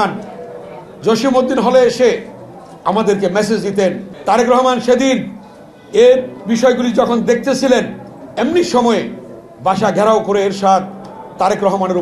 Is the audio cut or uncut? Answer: cut